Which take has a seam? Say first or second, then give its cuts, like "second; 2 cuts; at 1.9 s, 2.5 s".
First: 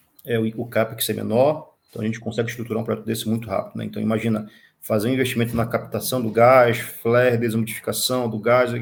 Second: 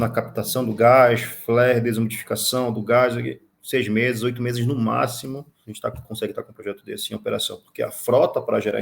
second; 1 cut; at 5.6 s